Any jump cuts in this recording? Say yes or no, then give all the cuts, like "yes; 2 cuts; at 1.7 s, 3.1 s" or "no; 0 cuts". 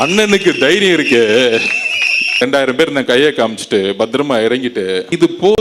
yes; 1 cut; at 2.4 s